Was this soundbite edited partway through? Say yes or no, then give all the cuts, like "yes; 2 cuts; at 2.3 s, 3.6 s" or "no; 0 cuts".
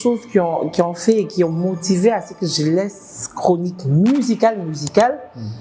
no; 0 cuts